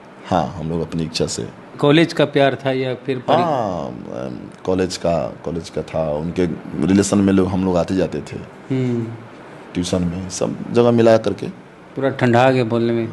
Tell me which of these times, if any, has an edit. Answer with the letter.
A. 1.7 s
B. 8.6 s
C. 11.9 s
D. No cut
A